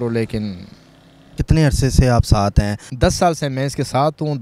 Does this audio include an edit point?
yes; 2 cuts; at 1.4 s, 2.8 s

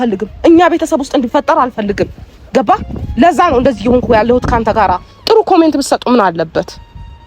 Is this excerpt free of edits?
no; 1 cut; at 5.0 s

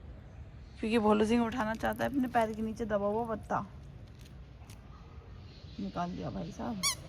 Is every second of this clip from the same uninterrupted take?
yes; 0 cuts

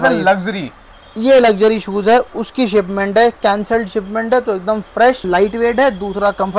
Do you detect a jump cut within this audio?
yes; 1 cut; at 5.2 s

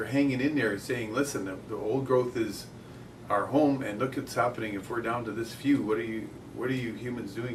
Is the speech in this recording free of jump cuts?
yes; 0 cuts

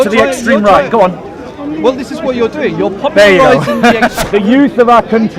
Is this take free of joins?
no; 1 cut; at 4.2 s

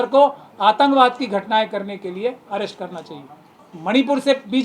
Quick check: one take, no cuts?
no; 1 cut; at 3.7 s

